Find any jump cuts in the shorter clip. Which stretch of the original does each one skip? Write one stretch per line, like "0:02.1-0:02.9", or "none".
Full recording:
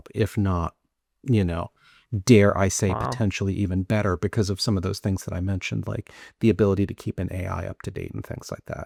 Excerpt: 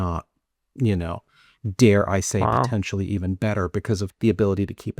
0:04.6-0:06.3